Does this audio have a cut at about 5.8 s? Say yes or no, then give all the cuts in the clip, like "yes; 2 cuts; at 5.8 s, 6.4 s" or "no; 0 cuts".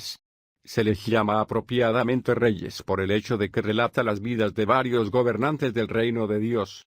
no; 1 cut; at 3.0 s